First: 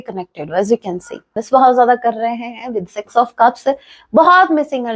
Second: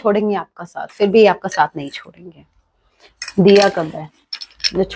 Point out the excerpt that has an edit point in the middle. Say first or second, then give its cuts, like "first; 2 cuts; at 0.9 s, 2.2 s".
first; 1 cut; at 1.3 s